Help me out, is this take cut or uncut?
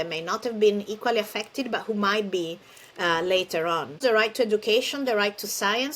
cut